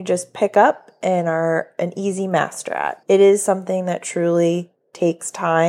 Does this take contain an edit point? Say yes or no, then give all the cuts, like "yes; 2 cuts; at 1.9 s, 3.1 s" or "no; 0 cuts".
yes; 1 cut; at 3.0 s